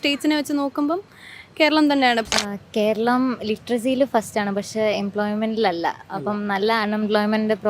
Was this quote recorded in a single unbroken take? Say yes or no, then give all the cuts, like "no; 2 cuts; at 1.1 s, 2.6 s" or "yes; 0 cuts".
no; 1 cut; at 2.3 s